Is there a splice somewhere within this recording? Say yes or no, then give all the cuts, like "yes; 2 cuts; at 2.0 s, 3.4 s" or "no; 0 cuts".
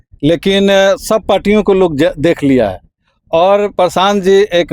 no; 0 cuts